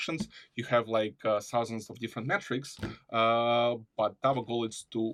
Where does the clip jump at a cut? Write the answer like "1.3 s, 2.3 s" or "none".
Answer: none